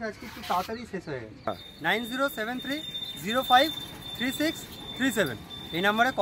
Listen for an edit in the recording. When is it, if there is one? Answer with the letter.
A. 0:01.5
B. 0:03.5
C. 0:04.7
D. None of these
A